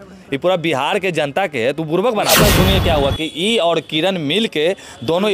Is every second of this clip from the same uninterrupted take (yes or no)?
no